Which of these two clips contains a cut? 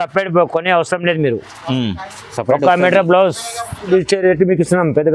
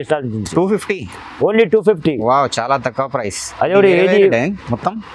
first; 1 cut; at 3.9 s

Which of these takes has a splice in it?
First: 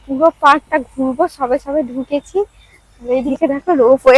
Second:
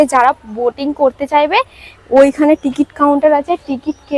first; 1 cut; at 3.3 s

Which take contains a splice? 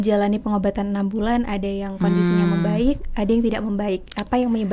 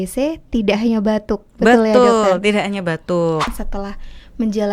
second; 1 cut; at 3.6 s

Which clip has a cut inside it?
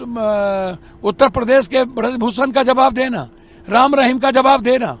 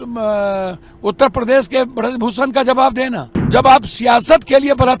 second; 1 cut; at 3.5 s

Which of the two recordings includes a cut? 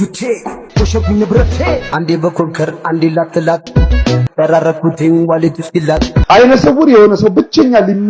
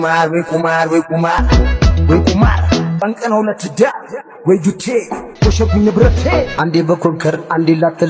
first; 1 cut; at 6.2 s

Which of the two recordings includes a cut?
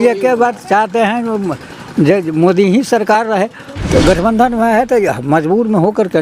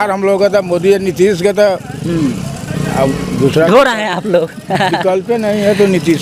first; 1 cut; at 3.6 s

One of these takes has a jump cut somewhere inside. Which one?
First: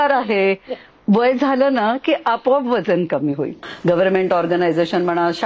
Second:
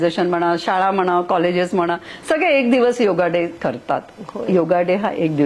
first; 1 cut; at 3.7 s

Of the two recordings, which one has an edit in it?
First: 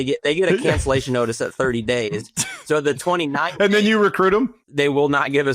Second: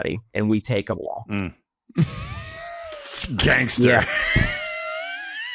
first; 1 cut; at 4.6 s

